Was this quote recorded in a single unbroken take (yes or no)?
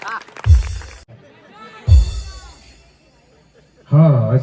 no